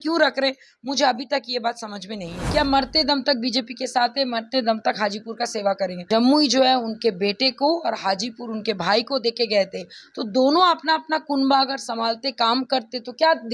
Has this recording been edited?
yes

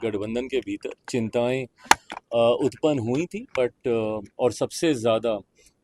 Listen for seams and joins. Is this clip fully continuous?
yes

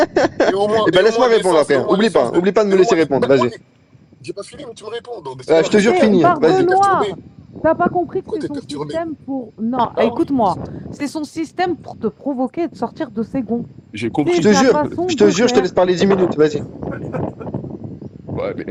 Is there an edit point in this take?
no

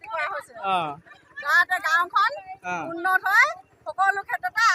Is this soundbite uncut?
no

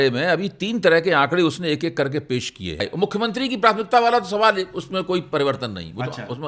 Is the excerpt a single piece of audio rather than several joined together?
no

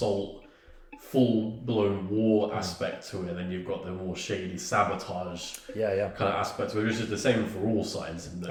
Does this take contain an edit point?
no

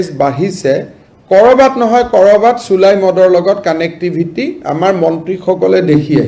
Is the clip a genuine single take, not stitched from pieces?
yes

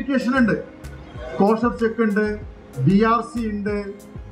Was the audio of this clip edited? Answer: no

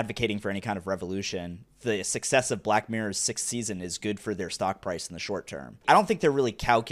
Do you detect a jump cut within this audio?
yes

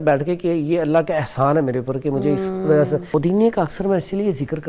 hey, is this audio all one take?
no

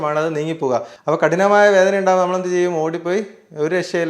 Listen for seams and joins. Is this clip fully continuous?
no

